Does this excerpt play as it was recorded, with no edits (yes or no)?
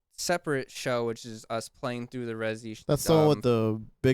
no